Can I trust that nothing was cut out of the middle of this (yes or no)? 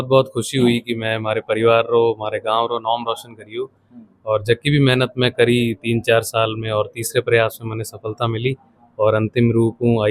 yes